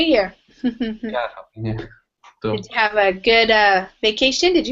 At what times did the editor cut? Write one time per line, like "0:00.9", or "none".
0:01.9